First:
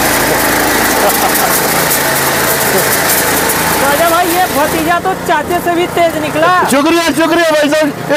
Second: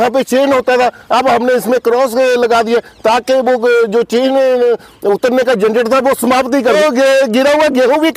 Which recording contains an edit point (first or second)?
second